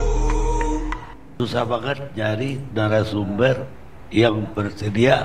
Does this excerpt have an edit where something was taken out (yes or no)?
yes